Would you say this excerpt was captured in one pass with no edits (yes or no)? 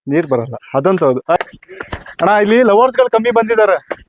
no